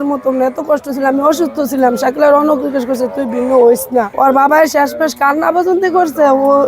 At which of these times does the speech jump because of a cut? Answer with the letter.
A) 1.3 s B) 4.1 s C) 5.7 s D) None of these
B